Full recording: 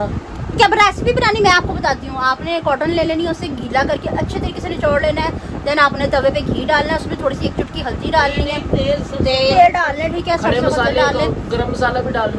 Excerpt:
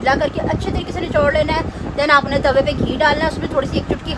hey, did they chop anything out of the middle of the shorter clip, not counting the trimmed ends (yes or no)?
no